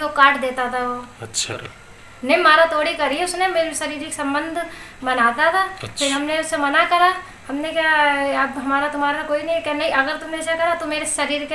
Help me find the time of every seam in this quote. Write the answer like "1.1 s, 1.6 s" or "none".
1.6 s, 5.7 s